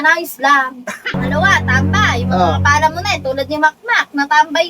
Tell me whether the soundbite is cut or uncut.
cut